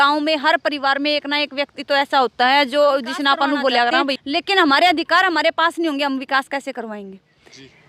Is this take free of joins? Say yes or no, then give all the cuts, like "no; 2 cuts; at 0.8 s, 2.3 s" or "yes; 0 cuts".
no; 1 cut; at 4.2 s